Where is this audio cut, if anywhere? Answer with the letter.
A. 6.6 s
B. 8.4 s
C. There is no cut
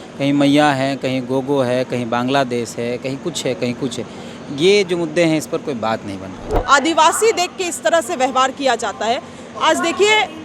A